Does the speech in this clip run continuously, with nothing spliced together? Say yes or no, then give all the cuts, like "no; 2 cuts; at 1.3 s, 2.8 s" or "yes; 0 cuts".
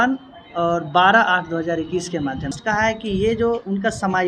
no; 1 cut; at 2.6 s